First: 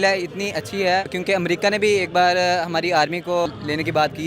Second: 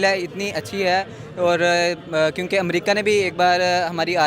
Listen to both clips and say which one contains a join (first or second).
first